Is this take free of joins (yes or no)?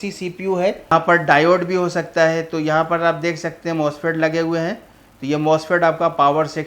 no